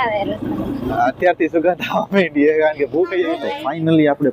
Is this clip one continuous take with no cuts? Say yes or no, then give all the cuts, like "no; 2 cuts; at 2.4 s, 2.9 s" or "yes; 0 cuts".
no; 1 cut; at 3.4 s